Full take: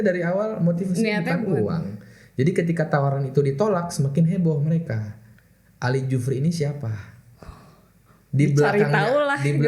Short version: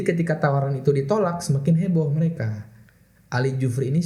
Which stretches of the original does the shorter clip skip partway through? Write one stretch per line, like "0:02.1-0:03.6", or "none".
none